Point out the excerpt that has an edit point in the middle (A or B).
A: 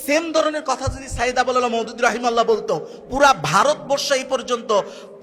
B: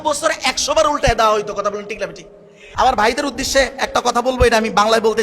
B